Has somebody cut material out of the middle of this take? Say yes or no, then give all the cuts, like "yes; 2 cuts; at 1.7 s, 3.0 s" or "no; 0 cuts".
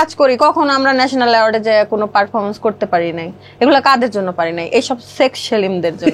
no; 0 cuts